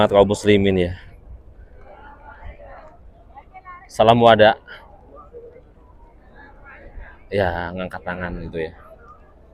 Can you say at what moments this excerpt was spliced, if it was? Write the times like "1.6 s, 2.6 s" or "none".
none